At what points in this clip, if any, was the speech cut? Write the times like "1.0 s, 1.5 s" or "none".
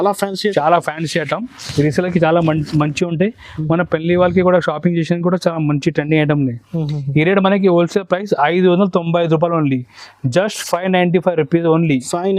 none